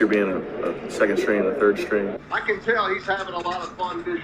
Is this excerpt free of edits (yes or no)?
no